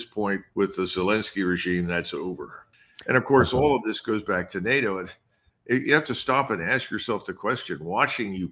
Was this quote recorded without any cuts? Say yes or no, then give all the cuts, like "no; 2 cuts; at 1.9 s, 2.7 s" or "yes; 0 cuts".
no; 1 cut; at 2.6 s